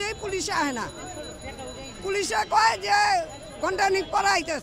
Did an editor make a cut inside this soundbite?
no; 0 cuts

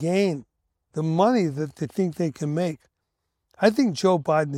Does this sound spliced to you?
no; 0 cuts

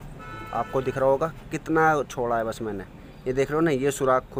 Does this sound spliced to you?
no; 0 cuts

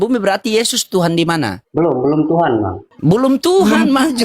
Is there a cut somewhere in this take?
yes; 2 cuts; at 1.6 s, 2.8 s

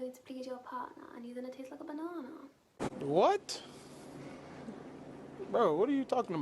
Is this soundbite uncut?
no; 1 cut; at 2.9 s

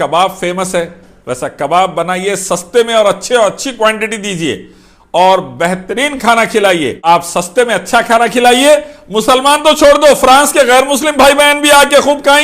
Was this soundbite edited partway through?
yes; 1 cut; at 7.1 s

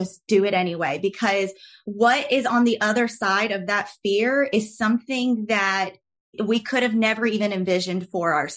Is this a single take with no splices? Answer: yes; 0 cuts

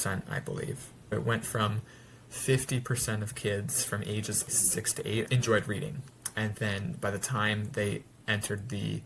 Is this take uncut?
no; 2 cuts; at 1.1 s, 4.6 s

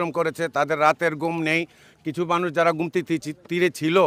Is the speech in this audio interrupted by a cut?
no; 0 cuts

